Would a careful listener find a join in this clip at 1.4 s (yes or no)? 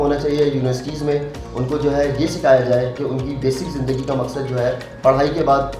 yes